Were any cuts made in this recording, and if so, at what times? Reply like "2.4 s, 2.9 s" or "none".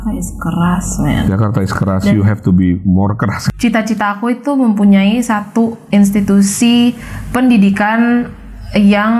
3.4 s